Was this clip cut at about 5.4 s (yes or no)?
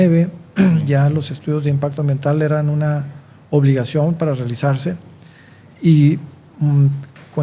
no